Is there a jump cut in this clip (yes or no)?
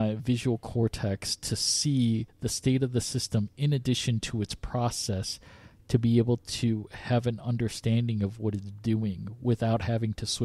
no